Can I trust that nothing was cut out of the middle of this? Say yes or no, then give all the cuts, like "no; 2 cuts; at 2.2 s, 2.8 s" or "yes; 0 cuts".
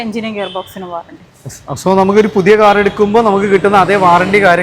yes; 0 cuts